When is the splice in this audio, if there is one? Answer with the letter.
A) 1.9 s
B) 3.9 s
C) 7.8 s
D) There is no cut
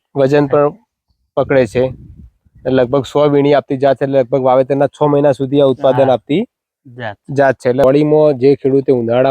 C